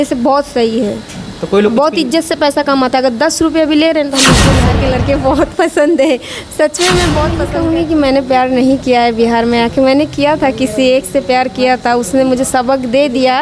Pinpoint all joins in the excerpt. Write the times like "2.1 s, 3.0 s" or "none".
4.5 s, 7.4 s